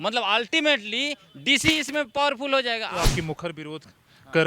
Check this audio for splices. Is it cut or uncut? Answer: cut